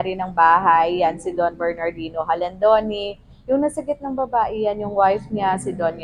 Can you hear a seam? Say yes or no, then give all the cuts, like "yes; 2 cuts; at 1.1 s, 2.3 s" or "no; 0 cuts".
no; 0 cuts